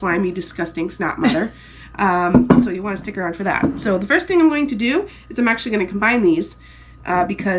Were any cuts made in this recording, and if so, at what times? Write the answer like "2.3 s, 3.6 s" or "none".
none